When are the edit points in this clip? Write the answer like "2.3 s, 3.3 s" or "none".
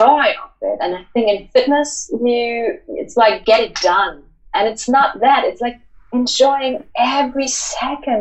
3.4 s